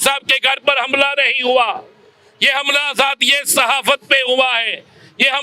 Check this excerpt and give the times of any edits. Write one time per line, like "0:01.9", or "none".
none